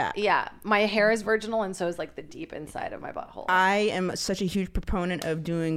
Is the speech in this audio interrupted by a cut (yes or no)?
no